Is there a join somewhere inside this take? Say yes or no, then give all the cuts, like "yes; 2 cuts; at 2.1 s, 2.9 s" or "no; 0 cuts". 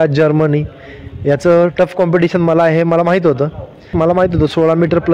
yes; 1 cut; at 3.9 s